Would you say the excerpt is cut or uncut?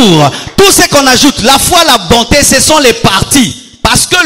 uncut